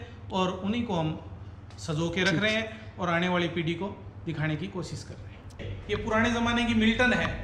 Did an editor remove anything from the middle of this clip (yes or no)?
yes